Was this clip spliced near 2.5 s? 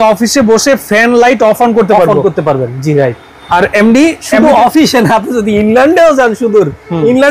no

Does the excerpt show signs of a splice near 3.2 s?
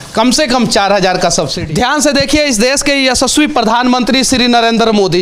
no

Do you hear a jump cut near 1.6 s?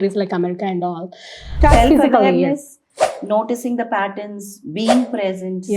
yes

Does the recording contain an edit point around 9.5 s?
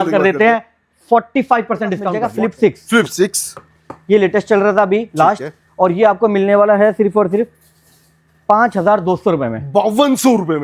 no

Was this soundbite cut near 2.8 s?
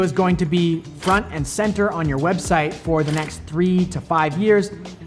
no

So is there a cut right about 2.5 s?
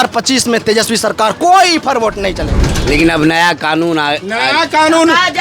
yes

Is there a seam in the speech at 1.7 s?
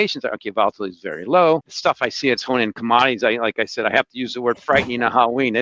yes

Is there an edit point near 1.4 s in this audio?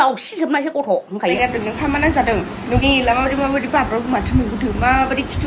yes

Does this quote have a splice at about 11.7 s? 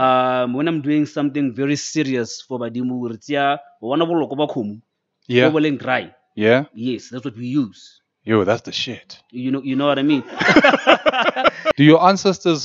yes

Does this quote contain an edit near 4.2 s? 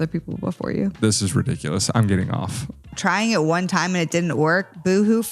no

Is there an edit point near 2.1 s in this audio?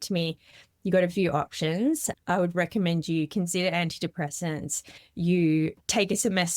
yes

